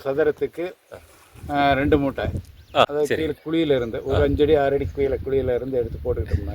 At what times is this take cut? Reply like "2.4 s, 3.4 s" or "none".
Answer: 2.9 s